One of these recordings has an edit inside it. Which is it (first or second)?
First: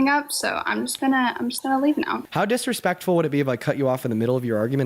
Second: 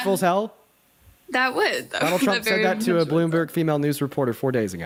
first